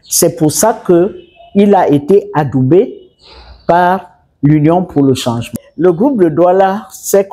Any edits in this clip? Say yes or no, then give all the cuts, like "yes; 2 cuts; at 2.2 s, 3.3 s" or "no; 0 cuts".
yes; 1 cut; at 5.6 s